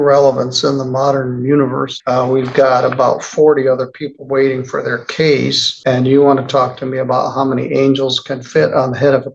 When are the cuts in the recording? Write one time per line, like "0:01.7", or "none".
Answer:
0:01.9
0:05.7